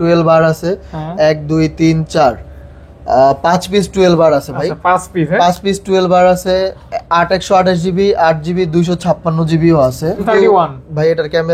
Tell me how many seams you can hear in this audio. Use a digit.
1